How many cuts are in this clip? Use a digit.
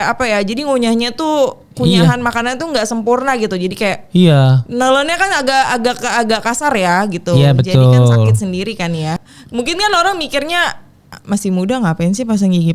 1